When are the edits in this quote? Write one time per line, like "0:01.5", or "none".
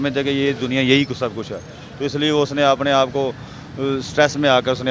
none

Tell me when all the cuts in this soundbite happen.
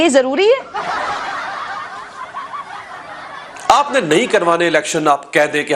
0:03.6

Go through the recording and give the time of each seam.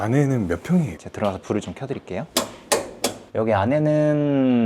0:01.0
0:02.3
0:03.2

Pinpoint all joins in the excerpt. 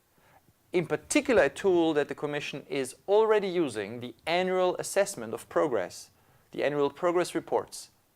0:04.4

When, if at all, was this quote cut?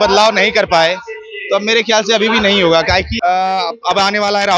0:03.1

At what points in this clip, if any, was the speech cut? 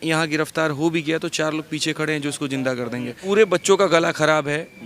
0:03.2

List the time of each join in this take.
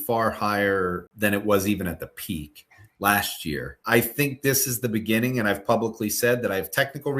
0:01.1
0:03.7

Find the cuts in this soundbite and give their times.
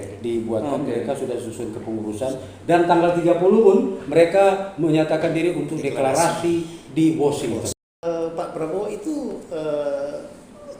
0:08.0

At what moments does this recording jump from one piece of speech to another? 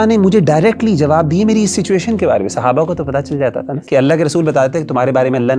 0:03.8

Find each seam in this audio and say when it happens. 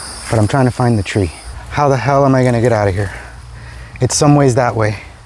0:01.4

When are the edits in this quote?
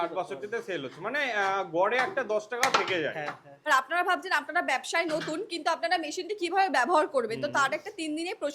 0:03.5

